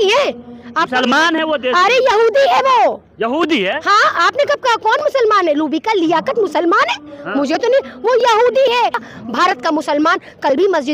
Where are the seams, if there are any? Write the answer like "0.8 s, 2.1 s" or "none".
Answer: 9.0 s